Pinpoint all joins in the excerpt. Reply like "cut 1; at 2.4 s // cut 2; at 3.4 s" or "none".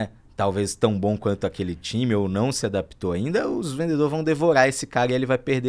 none